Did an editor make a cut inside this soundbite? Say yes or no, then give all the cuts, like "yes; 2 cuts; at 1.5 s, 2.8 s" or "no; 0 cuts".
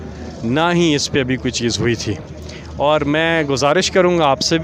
no; 0 cuts